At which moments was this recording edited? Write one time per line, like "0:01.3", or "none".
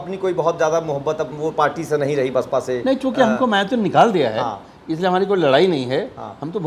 none